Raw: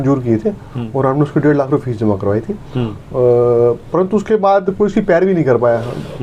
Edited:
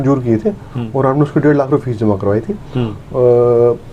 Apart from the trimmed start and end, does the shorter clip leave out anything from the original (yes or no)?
no